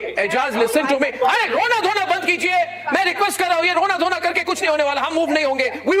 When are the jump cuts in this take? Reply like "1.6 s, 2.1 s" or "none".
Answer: none